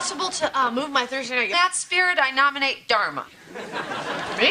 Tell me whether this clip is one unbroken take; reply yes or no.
yes